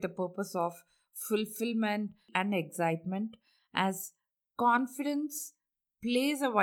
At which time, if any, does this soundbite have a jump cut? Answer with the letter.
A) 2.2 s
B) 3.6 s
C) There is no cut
A